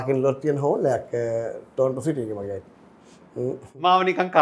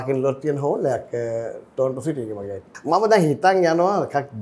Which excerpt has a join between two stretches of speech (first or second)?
second